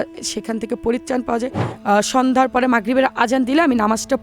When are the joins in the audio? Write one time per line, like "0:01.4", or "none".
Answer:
0:01.7